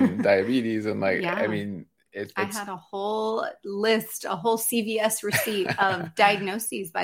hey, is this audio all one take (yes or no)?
yes